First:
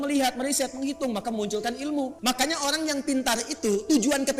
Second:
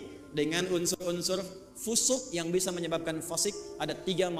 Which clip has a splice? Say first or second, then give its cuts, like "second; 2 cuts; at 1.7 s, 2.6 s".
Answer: first; 1 cut; at 2.2 s